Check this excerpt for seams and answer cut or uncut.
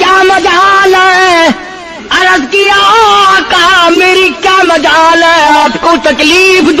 uncut